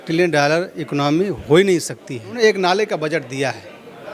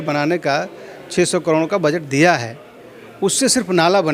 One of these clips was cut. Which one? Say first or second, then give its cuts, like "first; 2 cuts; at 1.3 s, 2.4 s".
first; 1 cut; at 2.4 s